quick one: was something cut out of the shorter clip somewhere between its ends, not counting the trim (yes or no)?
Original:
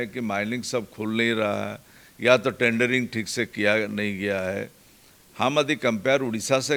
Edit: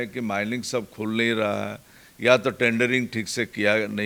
no